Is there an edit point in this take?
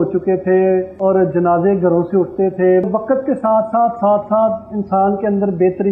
yes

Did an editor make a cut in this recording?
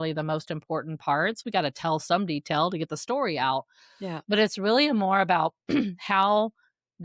no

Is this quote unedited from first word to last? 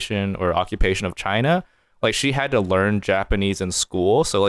yes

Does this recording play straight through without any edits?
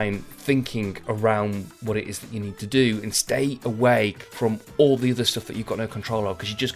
no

